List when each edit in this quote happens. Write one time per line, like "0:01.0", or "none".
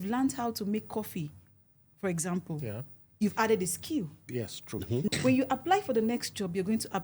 0:05.1